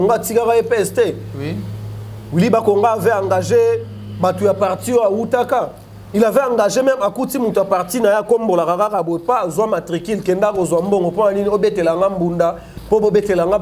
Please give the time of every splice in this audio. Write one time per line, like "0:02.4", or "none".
none